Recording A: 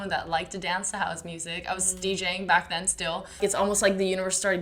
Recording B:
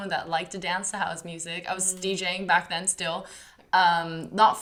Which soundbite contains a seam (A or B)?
A